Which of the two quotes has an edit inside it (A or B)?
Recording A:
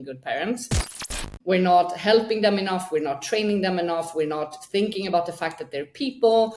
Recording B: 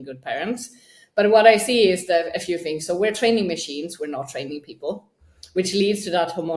A